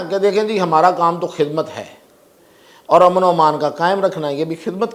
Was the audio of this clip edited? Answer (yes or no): no